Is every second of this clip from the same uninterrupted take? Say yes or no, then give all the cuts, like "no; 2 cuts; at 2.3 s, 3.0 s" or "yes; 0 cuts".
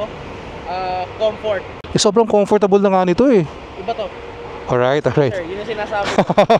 no; 1 cut; at 1.8 s